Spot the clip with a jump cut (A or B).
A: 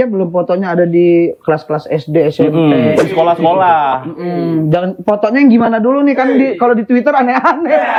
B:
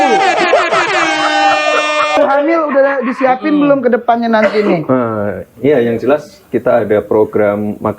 B